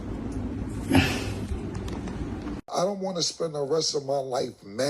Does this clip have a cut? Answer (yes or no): yes